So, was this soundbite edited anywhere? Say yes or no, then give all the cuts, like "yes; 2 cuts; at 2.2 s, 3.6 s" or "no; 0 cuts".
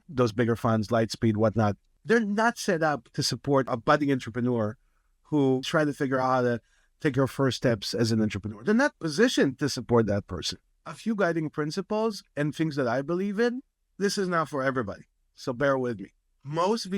yes; 4 cuts; at 1.9 s, 3.7 s, 5.7 s, 10.7 s